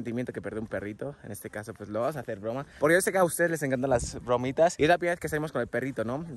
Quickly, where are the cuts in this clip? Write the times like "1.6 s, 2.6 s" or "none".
none